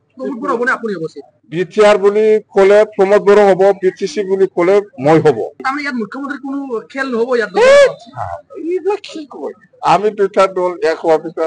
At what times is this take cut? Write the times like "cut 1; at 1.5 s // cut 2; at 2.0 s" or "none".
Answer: cut 1; at 1.3 s // cut 2; at 5.6 s